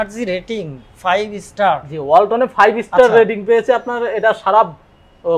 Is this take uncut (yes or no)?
yes